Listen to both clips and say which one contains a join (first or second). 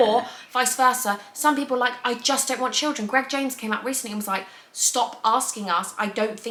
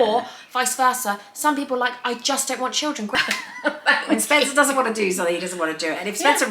second